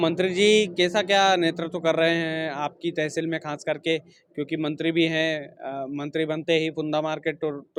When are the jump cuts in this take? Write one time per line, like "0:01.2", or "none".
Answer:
none